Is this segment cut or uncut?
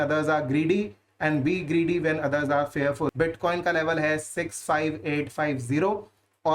cut